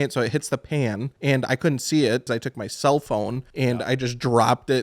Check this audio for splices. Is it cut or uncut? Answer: cut